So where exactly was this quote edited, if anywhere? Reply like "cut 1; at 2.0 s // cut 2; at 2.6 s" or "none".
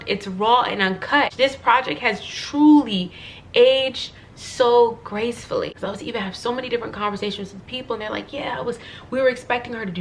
cut 1; at 1.3 s // cut 2; at 5.8 s